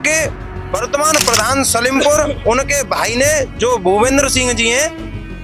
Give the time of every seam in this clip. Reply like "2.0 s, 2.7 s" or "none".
none

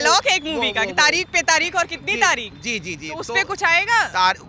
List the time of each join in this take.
none

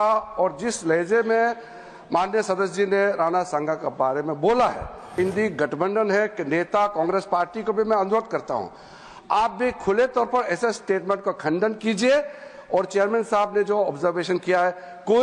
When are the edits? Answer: 5.2 s

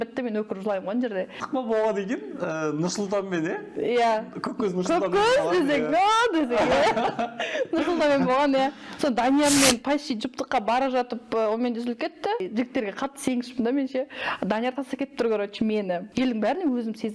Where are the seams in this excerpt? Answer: 1.4 s, 12.4 s, 16.0 s

